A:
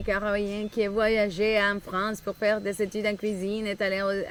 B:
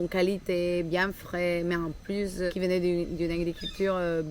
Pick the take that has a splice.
B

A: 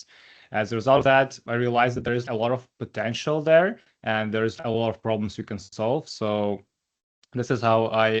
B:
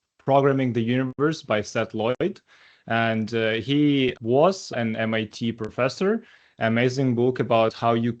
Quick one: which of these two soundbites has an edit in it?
A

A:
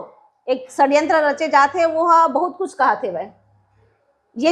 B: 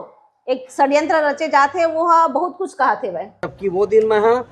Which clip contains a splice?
B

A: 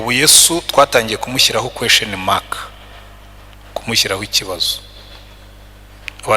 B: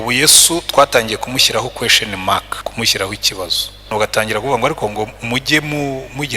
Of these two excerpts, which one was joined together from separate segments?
B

